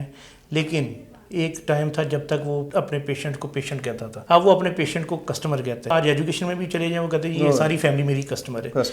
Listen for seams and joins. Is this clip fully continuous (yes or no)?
no